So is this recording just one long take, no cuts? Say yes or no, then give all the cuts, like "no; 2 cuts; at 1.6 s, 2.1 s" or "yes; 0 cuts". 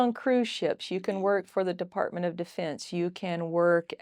yes; 0 cuts